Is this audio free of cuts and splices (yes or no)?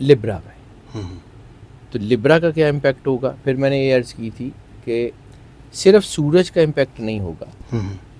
yes